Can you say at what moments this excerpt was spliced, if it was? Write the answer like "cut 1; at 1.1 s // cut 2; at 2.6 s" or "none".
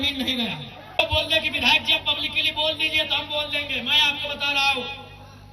cut 1; at 1.0 s